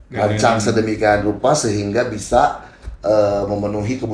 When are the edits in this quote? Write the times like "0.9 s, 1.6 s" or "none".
none